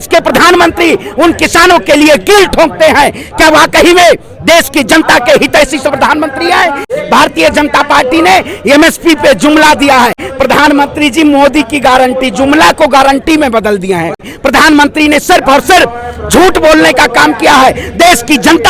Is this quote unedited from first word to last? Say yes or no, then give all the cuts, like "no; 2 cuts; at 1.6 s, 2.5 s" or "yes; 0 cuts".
no; 3 cuts; at 6.9 s, 10.3 s, 14.3 s